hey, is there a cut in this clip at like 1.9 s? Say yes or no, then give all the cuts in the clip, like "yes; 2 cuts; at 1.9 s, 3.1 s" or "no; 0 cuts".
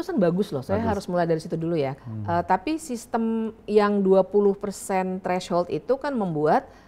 yes; 1 cut; at 1.9 s